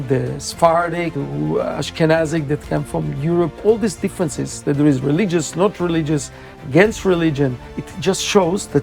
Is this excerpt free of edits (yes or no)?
no